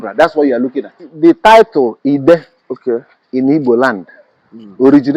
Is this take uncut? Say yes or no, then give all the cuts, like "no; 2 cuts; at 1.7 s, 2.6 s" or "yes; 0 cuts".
no; 1 cut; at 1.1 s